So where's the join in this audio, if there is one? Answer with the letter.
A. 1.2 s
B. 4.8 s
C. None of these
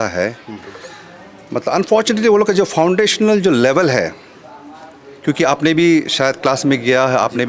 C